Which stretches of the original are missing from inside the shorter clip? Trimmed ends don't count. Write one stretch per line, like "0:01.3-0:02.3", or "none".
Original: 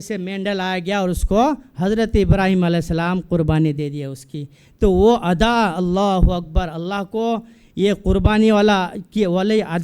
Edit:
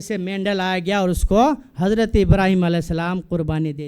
none